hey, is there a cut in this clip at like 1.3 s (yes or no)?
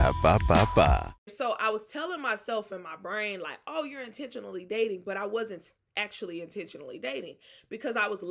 yes